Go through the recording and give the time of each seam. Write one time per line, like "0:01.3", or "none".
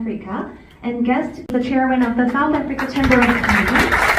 0:01.5